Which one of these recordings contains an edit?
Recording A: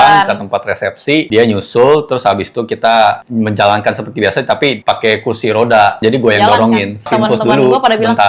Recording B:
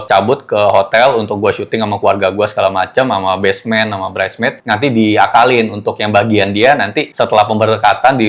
A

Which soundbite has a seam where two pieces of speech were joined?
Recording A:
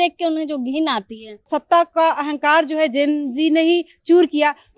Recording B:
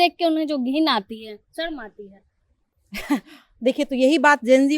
A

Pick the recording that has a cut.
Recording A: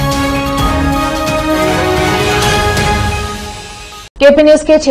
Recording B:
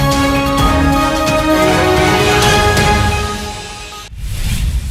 B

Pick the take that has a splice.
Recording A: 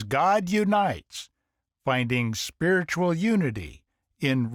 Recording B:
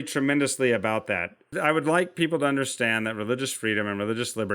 B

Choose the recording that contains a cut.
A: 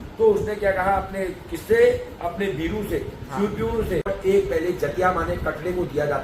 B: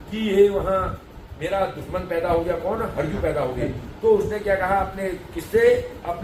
A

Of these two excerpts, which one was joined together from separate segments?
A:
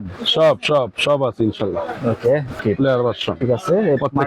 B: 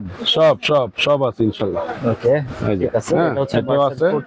A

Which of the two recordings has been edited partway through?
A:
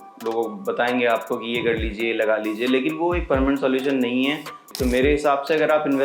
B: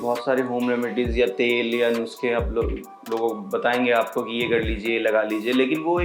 A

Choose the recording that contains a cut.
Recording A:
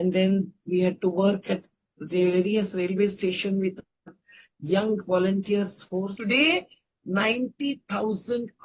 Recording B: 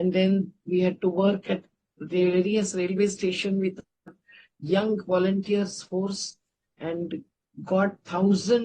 A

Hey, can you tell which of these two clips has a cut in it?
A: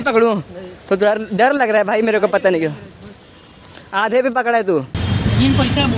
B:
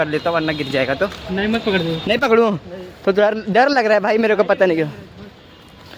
A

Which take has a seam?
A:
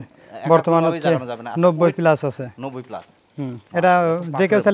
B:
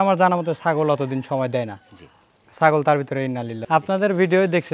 B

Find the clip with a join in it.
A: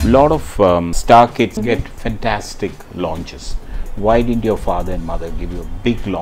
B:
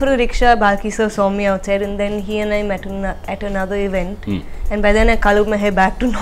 A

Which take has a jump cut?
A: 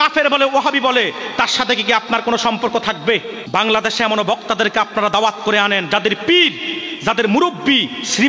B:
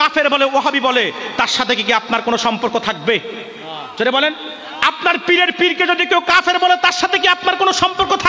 A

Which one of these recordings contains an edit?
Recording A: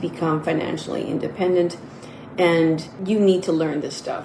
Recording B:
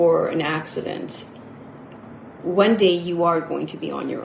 A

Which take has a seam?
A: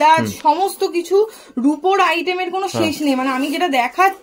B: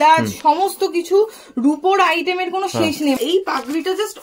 B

